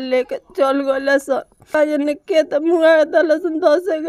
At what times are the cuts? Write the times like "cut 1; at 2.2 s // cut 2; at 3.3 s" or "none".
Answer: none